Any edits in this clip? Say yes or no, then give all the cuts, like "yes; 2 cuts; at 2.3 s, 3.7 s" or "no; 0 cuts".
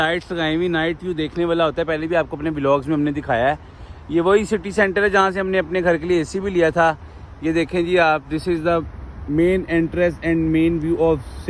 no; 0 cuts